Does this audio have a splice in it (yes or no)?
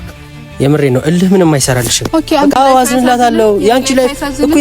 yes